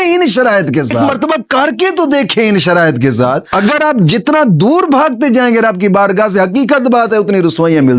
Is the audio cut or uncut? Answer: cut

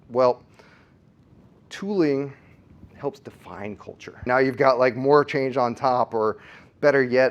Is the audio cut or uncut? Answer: cut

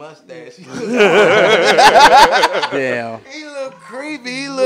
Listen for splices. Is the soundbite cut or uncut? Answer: uncut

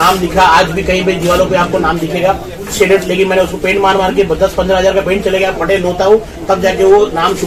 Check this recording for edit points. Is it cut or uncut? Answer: uncut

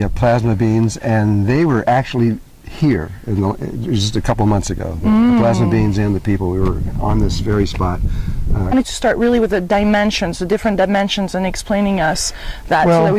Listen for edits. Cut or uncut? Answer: uncut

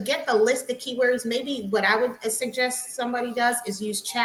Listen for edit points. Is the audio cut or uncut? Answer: uncut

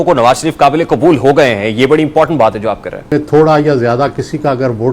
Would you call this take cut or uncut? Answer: cut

